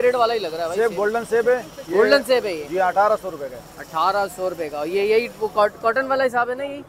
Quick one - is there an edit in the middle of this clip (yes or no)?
no